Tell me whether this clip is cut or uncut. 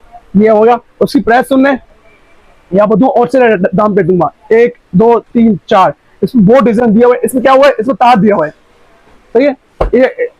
cut